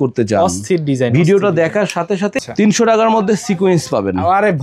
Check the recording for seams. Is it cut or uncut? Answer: cut